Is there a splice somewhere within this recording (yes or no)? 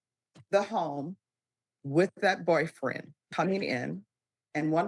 yes